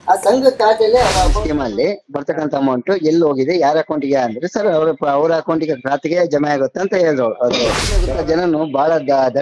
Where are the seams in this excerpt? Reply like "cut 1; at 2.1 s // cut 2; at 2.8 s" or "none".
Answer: cut 1; at 1.4 s // cut 2; at 8.0 s

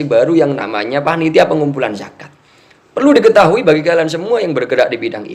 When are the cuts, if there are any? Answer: none

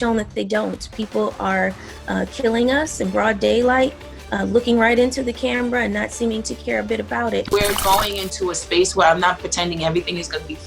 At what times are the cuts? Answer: cut 1; at 7.5 s

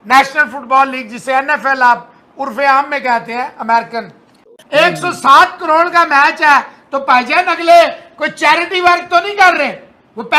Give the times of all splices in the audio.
cut 1; at 4.5 s

